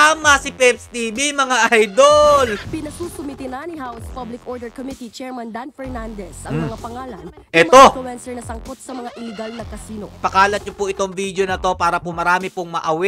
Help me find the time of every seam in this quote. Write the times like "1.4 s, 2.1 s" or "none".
2.6 s, 10.1 s